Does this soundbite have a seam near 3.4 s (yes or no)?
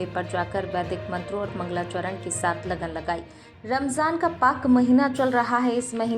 yes